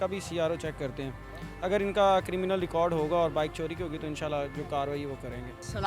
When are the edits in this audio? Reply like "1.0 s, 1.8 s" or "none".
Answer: none